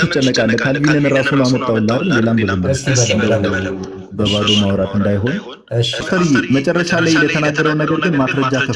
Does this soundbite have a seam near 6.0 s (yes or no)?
yes